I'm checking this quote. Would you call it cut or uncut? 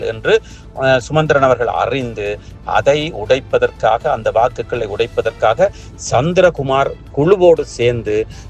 uncut